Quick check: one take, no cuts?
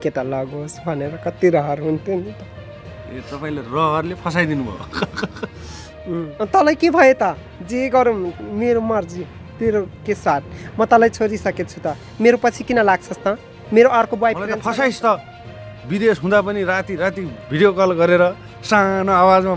no; 2 cuts; at 6.5 s, 14.6 s

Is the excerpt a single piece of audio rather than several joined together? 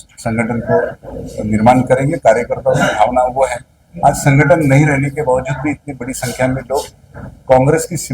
yes; 0 cuts

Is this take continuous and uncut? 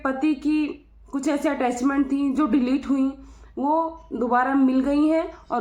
yes; 0 cuts

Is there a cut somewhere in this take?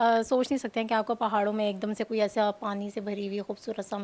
no; 0 cuts

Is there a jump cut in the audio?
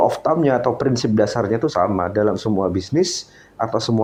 no; 0 cuts

